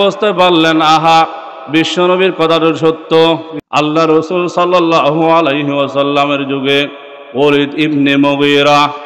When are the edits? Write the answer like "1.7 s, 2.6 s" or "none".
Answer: 3.5 s